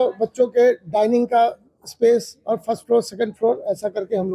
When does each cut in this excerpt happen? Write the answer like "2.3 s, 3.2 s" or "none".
none